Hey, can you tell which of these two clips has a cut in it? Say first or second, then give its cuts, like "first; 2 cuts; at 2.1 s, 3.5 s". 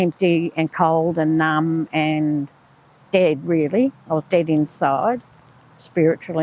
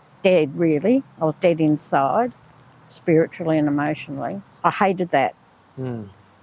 second; 1 cut; at 4.5 s